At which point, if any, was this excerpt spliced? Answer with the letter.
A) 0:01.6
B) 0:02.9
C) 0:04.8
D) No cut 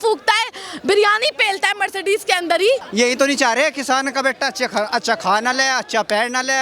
B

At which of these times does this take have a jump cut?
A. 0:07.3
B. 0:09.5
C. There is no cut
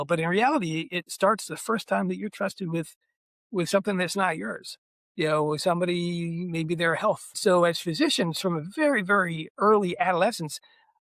A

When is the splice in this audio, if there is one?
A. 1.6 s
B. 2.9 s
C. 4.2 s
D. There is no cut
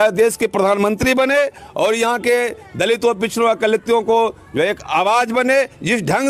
D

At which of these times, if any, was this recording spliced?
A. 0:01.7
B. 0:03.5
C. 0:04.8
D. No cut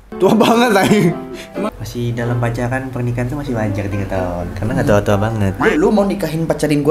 A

